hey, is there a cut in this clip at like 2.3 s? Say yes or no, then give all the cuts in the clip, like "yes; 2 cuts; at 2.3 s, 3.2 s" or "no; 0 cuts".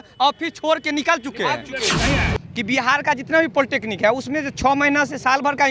yes; 1 cut; at 2.3 s